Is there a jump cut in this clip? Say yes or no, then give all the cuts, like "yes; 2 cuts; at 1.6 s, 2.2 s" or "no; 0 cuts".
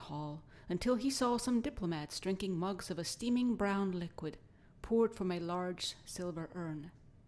yes; 1 cut; at 1.9 s